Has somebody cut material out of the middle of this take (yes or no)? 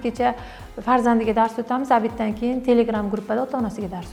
no